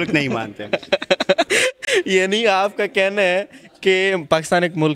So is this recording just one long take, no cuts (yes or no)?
yes